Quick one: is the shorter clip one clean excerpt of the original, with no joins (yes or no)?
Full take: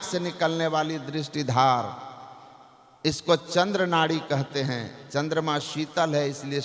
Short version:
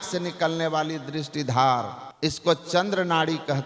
no